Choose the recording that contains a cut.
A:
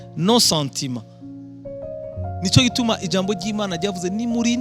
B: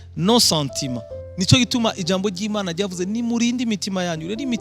B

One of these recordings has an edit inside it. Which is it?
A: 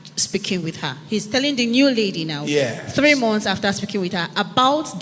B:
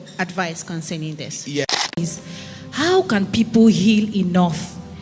B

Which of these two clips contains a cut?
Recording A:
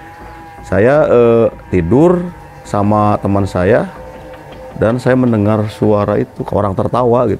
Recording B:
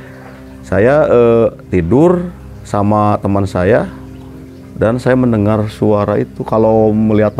A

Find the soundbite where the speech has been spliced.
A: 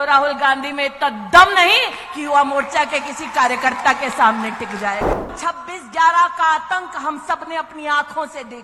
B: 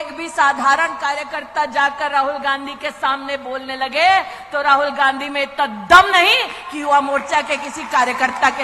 A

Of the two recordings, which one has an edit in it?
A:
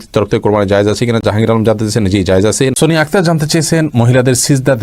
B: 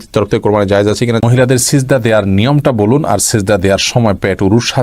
B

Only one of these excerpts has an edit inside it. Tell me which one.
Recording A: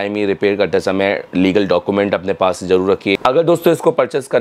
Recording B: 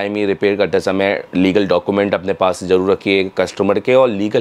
A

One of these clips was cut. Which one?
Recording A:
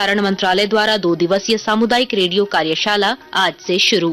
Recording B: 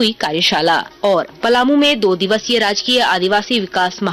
B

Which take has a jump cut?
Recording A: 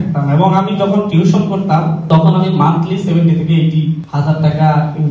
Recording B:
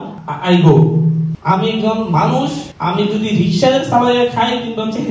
B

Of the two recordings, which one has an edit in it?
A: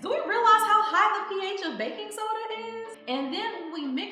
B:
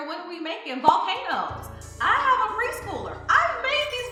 A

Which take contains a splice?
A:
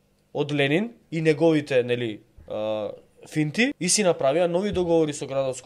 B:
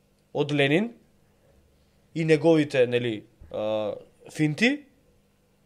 A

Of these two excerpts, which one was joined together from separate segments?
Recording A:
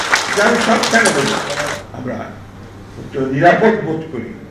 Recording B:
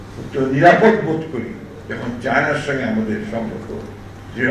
A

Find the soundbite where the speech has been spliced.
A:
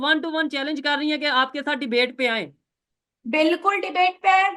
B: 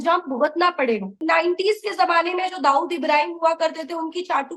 B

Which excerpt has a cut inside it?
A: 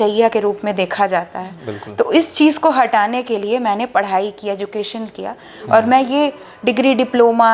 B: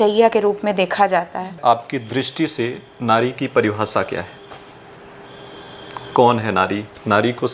B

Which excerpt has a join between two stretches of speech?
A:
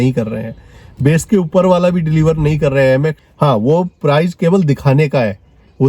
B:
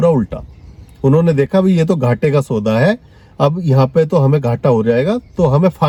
A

